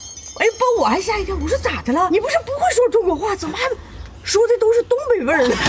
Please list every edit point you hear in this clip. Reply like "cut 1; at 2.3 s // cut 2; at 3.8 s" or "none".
cut 1; at 2.1 s